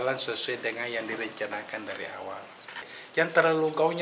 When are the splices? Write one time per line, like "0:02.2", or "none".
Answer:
0:02.9